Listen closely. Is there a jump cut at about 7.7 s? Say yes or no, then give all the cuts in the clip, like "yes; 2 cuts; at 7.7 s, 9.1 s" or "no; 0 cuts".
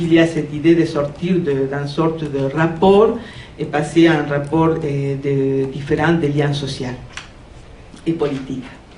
yes; 1 cut; at 7.7 s